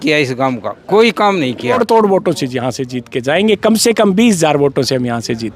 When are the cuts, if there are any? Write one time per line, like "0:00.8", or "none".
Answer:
0:01.8